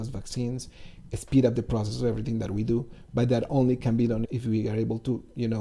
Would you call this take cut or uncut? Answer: cut